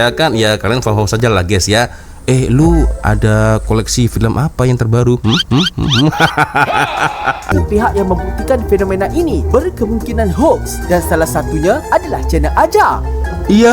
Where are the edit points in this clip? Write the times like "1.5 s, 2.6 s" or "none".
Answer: 7.5 s